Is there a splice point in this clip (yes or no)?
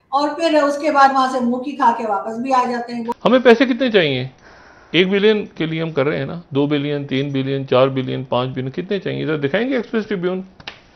yes